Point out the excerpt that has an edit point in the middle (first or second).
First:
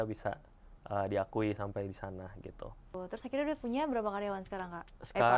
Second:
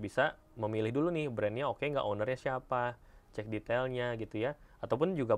first